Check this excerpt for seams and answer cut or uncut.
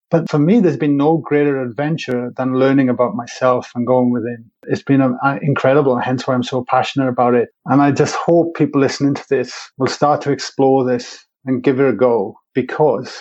uncut